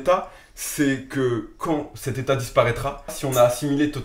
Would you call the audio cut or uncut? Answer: cut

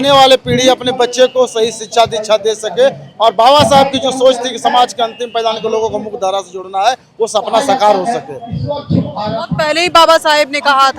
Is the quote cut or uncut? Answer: uncut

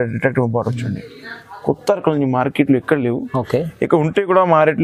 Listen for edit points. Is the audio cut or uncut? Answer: uncut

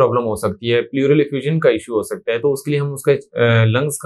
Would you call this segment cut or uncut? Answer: uncut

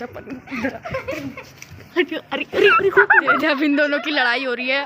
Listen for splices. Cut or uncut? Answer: cut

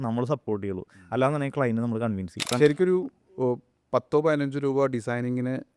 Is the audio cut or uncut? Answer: cut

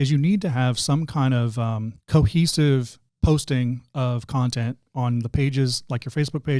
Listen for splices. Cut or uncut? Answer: cut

